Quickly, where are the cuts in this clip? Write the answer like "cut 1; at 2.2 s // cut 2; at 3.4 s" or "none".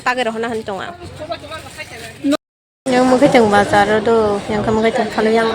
cut 1; at 2.4 s